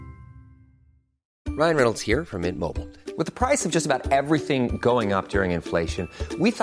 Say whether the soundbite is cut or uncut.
cut